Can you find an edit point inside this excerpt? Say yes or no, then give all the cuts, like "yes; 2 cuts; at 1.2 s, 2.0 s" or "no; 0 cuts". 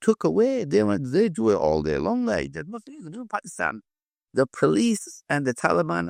no; 0 cuts